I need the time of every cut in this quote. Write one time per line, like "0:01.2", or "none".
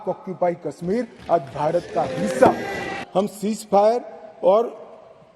0:02.9